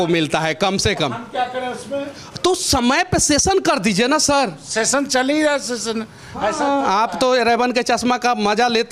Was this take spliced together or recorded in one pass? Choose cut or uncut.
uncut